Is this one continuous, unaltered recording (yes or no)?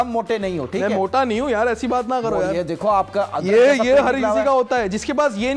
yes